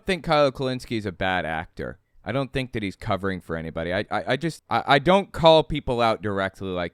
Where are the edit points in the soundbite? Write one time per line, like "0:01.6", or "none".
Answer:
0:04.6